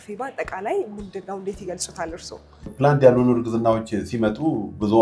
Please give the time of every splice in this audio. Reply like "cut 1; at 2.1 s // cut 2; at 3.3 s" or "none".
cut 1; at 2.7 s

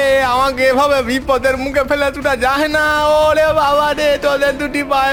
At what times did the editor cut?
none

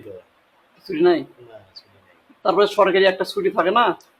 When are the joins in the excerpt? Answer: none

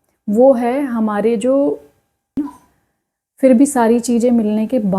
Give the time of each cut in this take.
cut 1; at 2.3 s

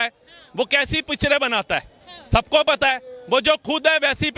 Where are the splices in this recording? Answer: none

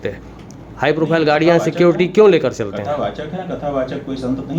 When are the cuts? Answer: none

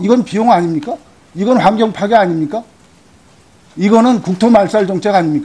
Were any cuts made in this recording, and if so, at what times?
cut 1; at 1.0 s

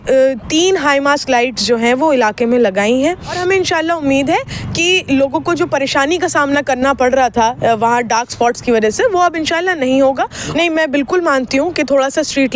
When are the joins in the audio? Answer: cut 1; at 3.4 s // cut 2; at 10.5 s

